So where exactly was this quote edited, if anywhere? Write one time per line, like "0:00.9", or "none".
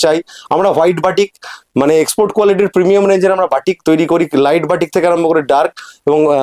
none